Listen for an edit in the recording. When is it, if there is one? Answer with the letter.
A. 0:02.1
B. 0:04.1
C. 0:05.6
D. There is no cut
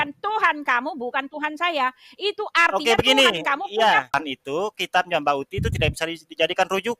B